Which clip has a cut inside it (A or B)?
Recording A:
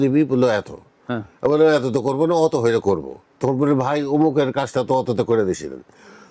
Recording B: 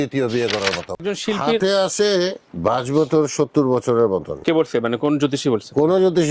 B